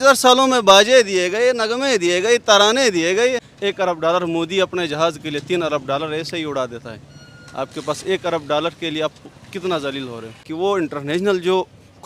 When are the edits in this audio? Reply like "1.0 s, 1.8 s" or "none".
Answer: 3.5 s, 10.5 s